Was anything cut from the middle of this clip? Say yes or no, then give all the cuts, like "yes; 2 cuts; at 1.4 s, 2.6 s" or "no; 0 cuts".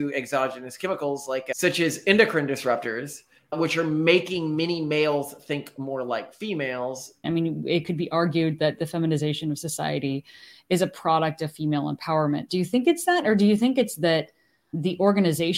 yes; 1 cut; at 7.2 s